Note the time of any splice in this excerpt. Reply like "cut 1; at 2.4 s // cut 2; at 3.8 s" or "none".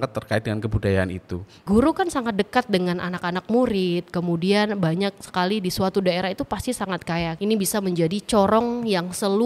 cut 1; at 1.6 s // cut 2; at 7.3 s

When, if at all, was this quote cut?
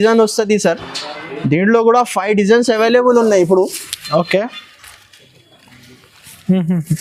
none

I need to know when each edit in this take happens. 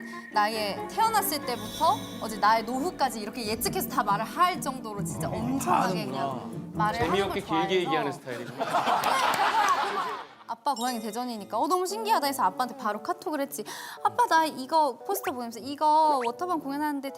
cut 1; at 10.1 s

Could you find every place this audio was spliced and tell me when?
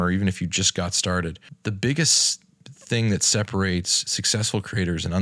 cut 1; at 1.5 s

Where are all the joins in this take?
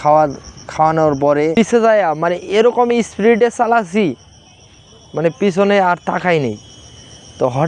cut 1; at 1.6 s

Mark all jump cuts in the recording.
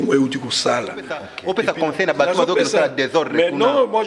cut 1; at 1.3 s

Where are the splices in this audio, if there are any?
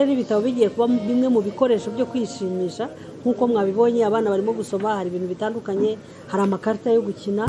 none

